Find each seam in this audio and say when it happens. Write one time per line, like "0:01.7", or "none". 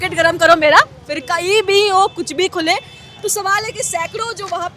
none